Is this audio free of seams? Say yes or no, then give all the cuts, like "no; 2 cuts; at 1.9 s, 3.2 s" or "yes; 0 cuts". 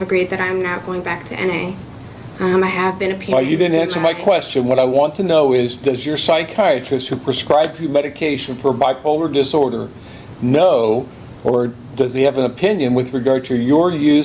yes; 0 cuts